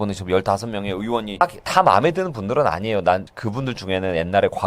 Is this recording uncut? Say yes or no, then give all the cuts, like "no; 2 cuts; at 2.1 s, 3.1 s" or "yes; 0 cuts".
yes; 0 cuts